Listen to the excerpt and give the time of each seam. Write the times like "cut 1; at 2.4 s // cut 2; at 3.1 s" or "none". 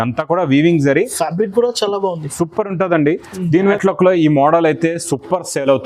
cut 1; at 3.7 s